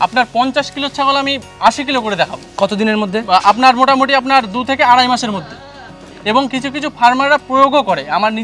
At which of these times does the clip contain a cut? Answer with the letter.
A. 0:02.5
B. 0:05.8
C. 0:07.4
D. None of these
D